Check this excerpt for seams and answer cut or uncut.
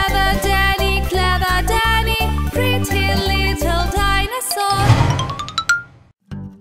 cut